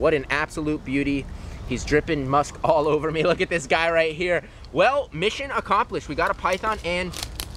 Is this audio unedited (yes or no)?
yes